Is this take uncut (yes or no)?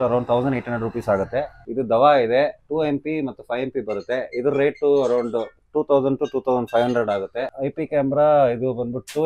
no